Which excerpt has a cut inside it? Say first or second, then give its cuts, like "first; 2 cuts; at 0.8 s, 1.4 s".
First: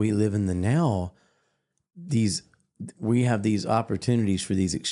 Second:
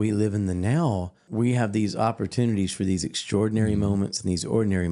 second; 1 cut; at 1.2 s